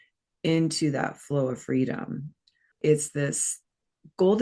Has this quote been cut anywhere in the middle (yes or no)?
yes